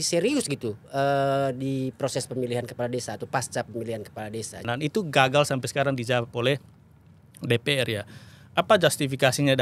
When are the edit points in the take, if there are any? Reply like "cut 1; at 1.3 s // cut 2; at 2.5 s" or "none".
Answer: cut 1; at 4.6 s